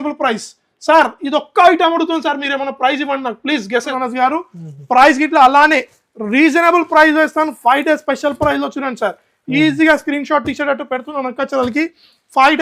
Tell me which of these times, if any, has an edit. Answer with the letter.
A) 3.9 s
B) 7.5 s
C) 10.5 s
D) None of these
A